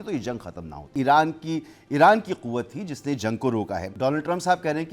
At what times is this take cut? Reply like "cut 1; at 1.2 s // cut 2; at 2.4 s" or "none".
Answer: cut 1; at 0.9 s // cut 2; at 3.8 s